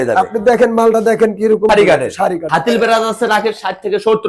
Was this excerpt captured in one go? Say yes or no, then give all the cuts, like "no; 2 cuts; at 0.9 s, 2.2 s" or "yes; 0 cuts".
no; 2 cuts; at 1.7 s, 2.4 s